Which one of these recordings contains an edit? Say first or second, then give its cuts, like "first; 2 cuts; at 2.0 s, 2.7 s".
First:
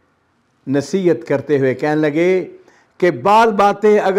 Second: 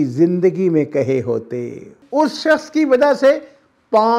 second; 1 cut; at 2.0 s